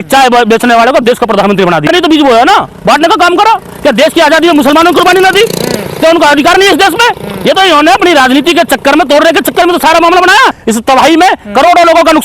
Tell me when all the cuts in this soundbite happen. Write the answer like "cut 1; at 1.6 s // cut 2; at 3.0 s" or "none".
cut 1; at 1.9 s // cut 2; at 10.6 s